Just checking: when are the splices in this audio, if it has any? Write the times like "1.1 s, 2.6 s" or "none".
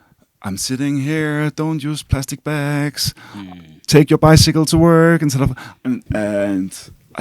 6.1 s